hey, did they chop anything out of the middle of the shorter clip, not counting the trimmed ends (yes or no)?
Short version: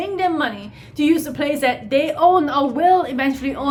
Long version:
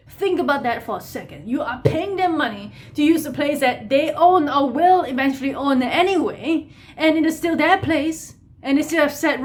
no